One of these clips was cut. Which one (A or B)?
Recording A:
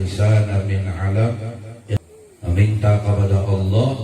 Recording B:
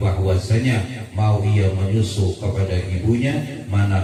A